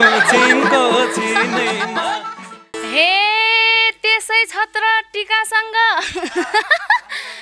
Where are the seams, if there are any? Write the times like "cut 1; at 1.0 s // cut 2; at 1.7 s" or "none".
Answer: cut 1; at 2.7 s